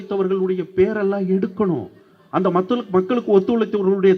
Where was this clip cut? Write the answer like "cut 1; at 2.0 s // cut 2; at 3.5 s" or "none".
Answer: none